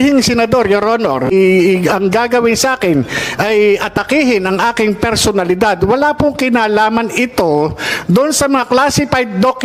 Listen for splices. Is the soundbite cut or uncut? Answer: cut